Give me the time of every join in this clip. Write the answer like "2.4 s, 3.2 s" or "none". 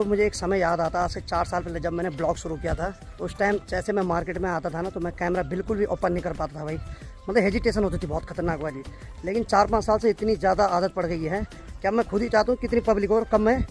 none